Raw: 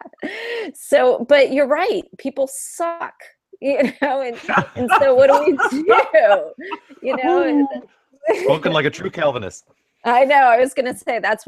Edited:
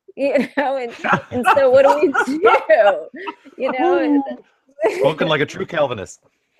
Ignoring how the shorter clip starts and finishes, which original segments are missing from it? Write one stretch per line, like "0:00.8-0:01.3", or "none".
none